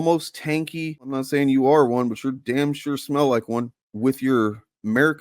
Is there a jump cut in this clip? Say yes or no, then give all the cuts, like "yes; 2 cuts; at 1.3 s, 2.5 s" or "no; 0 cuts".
yes; 2 cuts; at 1.2 s, 3.8 s